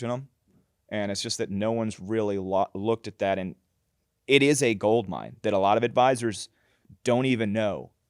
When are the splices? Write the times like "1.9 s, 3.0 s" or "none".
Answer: none